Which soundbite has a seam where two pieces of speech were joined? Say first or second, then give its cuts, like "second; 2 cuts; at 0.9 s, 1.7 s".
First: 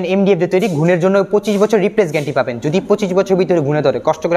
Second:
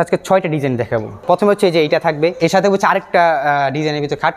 second; 2 cuts; at 1.2 s, 2.4 s